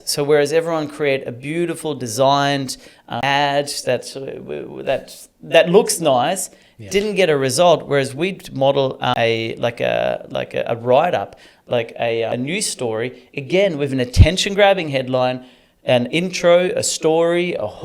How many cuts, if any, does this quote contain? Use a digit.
3